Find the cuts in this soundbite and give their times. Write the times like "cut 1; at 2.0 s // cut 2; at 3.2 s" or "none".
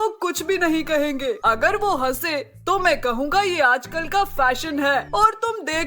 cut 1; at 1.4 s // cut 2; at 5.1 s